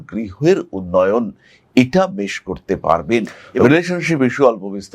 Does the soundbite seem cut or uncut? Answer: cut